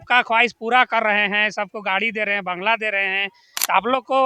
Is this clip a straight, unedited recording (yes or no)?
yes